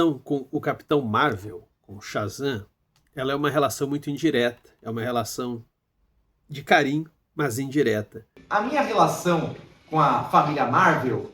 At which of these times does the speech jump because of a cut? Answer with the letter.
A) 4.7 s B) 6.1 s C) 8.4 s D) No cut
C